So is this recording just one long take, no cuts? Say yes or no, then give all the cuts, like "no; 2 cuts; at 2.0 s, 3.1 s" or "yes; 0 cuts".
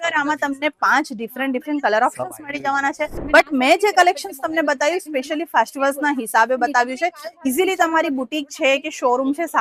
no; 1 cut; at 3.2 s